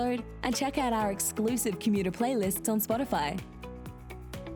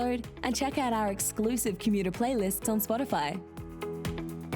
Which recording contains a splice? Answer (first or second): second